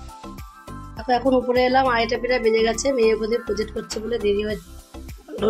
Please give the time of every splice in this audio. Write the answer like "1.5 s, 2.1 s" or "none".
1.0 s, 4.7 s